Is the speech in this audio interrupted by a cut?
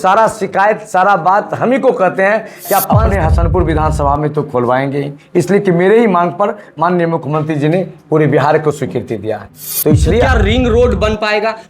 yes; 2 cuts; at 2.8 s, 10.2 s

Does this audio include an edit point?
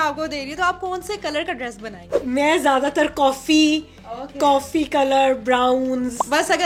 no; 0 cuts

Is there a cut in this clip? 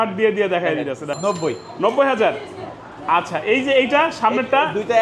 yes; 1 cut; at 1.1 s

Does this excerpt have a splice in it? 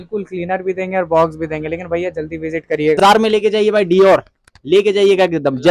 yes; 1 cut; at 3.0 s

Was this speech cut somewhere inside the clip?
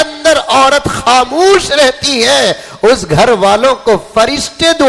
no; 0 cuts

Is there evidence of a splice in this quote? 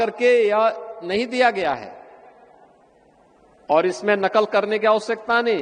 no; 0 cuts

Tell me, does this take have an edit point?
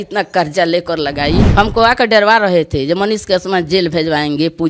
yes; 1 cut; at 1.5 s

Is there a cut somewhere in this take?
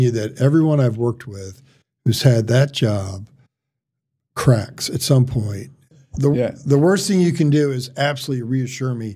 yes; 1 cut; at 5.9 s

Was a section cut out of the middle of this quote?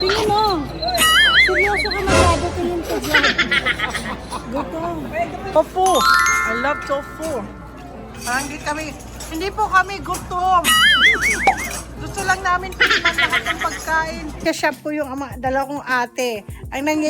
yes; 2 cuts; at 5.6 s, 14.4 s

